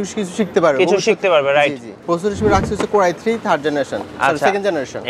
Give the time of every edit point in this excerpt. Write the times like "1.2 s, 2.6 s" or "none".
1.9 s